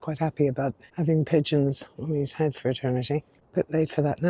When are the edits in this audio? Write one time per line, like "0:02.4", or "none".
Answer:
0:00.8
0:03.4